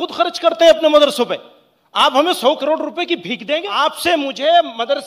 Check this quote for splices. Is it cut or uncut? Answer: cut